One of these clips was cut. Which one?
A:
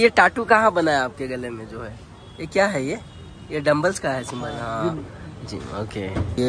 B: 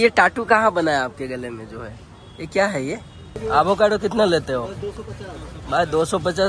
B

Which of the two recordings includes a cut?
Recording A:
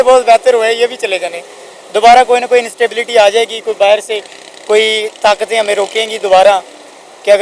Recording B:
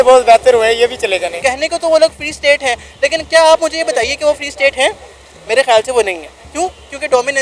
B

